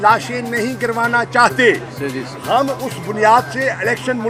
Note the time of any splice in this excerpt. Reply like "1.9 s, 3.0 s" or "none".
none